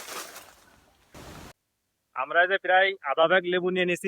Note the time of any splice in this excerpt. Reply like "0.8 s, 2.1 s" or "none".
1.1 s